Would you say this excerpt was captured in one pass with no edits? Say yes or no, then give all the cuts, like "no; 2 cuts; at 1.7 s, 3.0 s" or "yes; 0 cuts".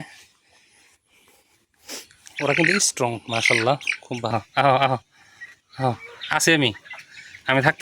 no; 1 cut; at 4.3 s